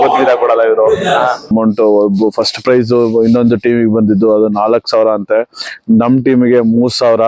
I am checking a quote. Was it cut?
yes; 1 cut; at 1.5 s

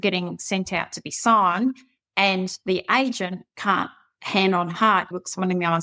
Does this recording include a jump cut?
no; 0 cuts

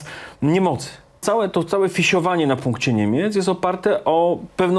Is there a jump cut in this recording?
yes; 1 cut; at 1.2 s

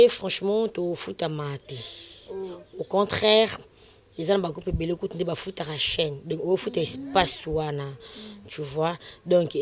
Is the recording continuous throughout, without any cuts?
yes; 0 cuts

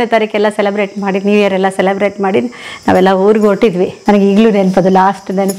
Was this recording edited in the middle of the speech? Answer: yes; 1 cut; at 4.0 s

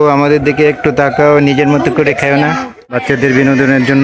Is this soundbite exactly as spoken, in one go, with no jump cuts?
no; 1 cut; at 2.9 s

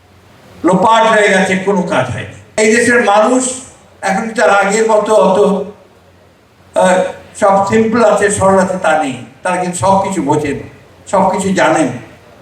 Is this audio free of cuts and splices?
no; 1 cut; at 2.4 s

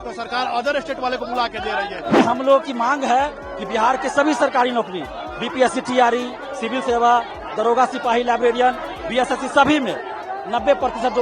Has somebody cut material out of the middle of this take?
yes; 1 cut; at 2.1 s

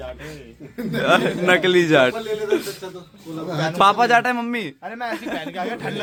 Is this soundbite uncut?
yes; 0 cuts

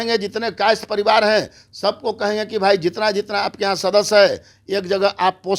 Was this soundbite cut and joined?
no; 0 cuts

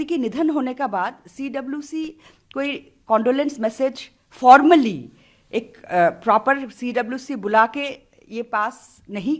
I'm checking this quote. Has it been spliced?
no; 0 cuts

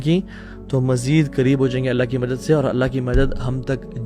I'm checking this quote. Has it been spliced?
no; 0 cuts

